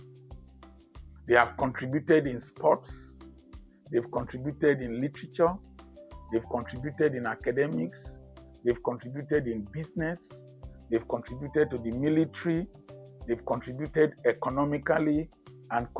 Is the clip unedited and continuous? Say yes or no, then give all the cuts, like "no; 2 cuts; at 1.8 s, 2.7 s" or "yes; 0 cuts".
no; 1 cut; at 1.2 s